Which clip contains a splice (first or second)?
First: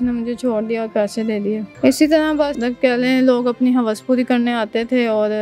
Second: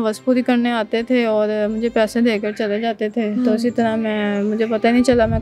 first